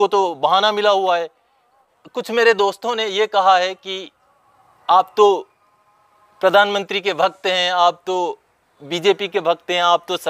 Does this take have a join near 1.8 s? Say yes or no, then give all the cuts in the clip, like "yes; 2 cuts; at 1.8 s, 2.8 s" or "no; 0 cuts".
yes; 1 cut; at 1.8 s